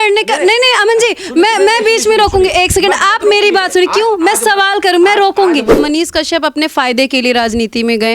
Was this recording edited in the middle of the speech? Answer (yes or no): yes